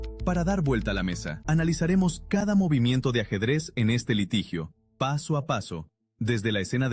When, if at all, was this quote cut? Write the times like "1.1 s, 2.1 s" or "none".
1.3 s